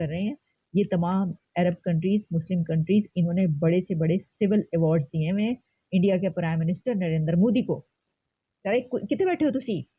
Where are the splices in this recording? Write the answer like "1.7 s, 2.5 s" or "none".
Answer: none